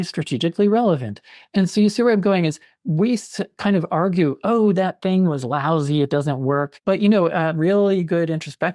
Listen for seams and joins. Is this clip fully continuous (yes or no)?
no